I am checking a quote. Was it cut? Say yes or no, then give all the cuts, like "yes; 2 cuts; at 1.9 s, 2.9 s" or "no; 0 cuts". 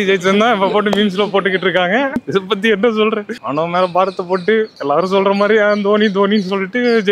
no; 0 cuts